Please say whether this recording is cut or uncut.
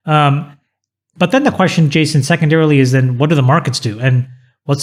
uncut